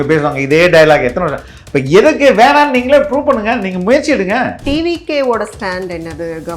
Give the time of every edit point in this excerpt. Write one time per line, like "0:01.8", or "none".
0:04.6